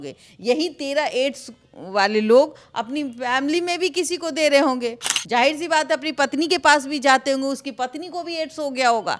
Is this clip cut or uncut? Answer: uncut